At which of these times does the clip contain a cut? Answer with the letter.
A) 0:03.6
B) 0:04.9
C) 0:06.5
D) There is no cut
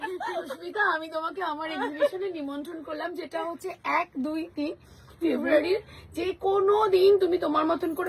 D